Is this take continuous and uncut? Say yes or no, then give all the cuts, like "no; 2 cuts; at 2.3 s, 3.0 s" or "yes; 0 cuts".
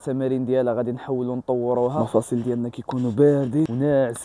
no; 1 cut; at 1.9 s